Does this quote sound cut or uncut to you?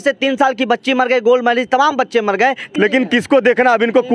cut